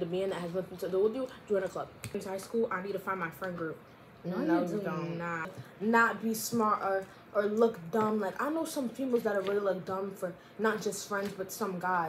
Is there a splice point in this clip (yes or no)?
yes